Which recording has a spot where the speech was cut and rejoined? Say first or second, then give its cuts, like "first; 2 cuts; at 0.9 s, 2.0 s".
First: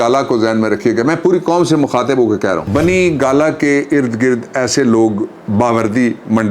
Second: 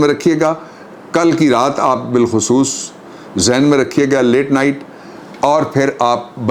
first; 1 cut; at 2.6 s